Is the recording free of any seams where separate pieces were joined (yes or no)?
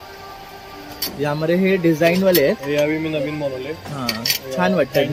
no